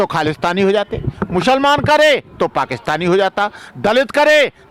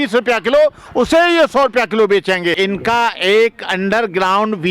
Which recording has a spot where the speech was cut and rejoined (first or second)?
second